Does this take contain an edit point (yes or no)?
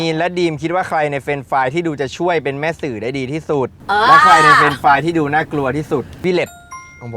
yes